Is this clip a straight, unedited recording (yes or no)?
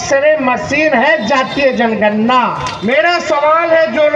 no